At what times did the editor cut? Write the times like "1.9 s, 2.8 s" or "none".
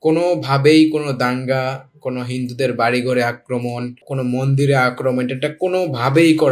4.0 s

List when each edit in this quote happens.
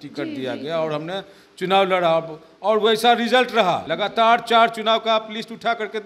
3.9 s

